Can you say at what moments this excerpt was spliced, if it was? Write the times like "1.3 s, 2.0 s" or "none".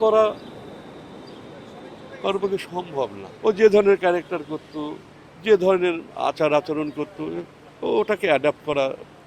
3.2 s